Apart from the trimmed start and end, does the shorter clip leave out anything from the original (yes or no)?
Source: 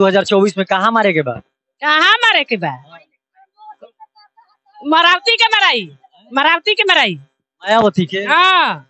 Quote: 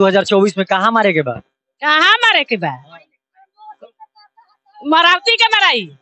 no